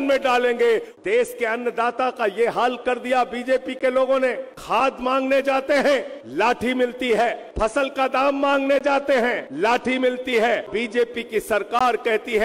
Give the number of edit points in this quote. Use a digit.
6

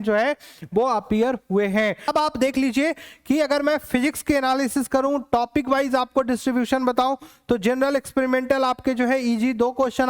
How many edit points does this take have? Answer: 1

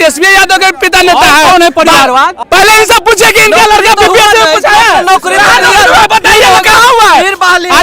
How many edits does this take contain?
1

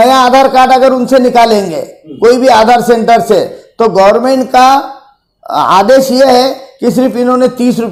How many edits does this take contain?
0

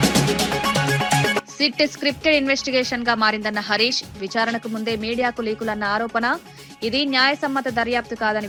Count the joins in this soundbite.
0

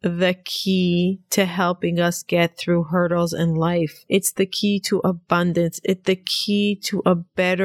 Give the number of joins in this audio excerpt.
0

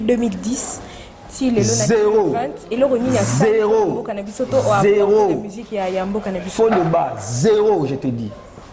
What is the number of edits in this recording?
0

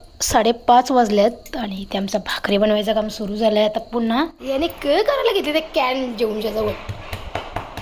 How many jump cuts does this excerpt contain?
1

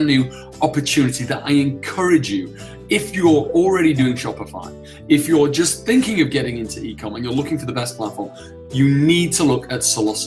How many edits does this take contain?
0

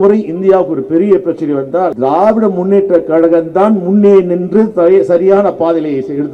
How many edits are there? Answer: 1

